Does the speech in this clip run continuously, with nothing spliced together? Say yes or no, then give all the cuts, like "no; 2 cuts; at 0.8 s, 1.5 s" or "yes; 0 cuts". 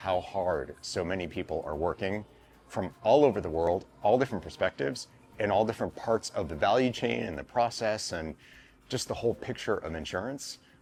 yes; 0 cuts